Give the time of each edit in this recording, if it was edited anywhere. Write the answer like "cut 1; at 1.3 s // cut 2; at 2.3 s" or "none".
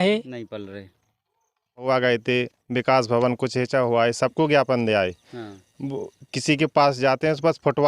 cut 1; at 1.9 s